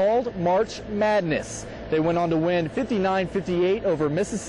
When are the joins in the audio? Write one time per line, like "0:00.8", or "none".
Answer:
none